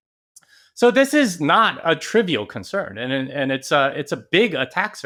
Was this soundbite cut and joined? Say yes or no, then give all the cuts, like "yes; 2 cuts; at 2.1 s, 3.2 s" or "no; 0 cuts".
no; 0 cuts